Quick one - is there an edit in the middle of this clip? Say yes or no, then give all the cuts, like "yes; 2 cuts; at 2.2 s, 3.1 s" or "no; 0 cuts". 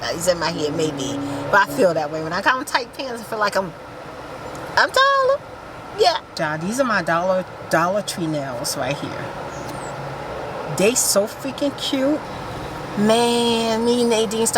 yes; 2 cuts; at 6.4 s, 12.3 s